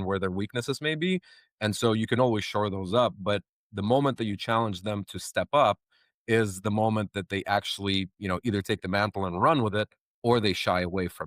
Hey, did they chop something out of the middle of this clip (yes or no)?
no